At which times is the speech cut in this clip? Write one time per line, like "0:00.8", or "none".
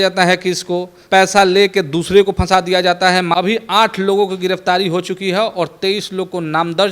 0:00.9
0:03.3